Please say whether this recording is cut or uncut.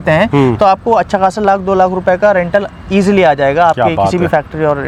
uncut